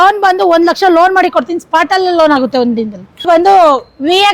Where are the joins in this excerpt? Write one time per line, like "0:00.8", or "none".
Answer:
0:03.3

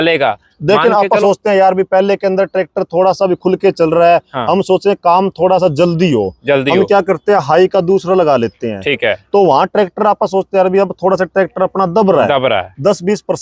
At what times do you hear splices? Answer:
none

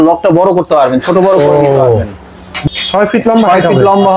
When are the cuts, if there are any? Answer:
0:02.6

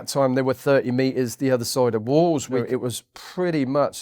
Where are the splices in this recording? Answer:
0:02.6

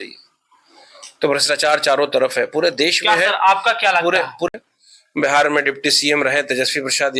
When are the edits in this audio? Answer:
0:04.5

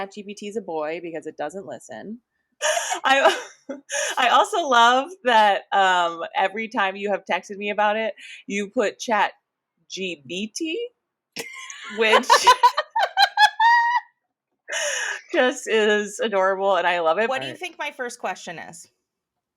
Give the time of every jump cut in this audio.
0:02.5
0:17.3

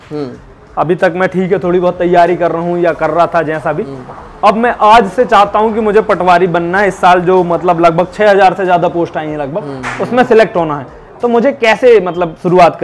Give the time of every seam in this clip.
none

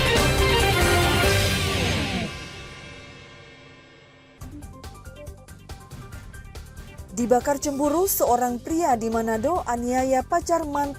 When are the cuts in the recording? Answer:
0:04.2

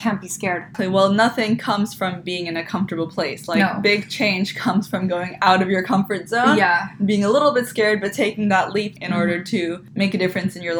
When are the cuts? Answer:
0:00.8
0:09.0
0:09.8

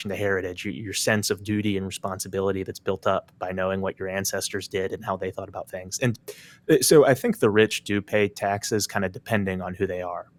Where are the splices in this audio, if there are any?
none

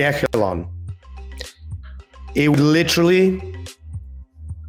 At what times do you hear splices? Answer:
none

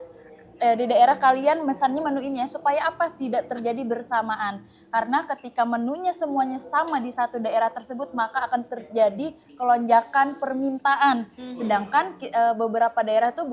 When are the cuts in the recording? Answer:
none

